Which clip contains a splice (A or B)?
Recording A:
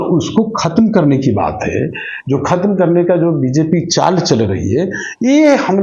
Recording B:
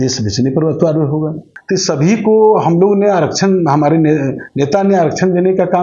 B